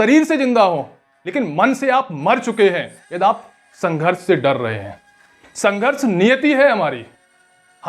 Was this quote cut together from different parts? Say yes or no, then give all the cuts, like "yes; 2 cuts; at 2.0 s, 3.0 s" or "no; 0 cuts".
no; 0 cuts